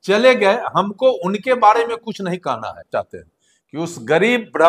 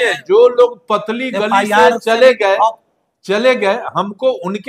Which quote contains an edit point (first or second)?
first